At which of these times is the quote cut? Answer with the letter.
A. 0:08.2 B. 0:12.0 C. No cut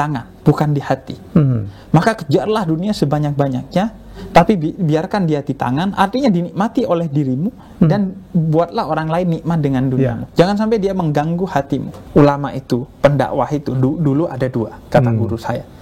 B